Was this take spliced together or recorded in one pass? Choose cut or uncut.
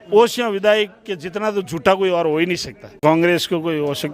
cut